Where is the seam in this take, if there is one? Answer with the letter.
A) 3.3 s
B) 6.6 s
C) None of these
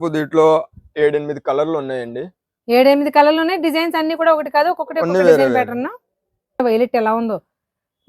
B